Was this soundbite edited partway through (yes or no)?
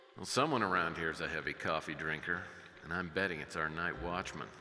no